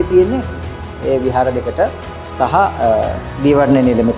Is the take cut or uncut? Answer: uncut